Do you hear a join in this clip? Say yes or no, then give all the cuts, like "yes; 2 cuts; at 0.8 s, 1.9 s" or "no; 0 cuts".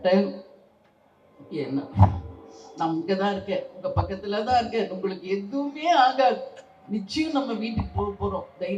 no; 0 cuts